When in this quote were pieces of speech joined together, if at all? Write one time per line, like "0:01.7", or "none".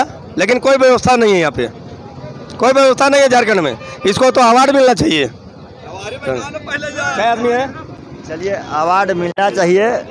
none